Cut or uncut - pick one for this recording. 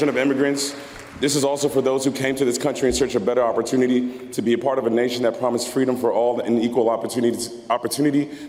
uncut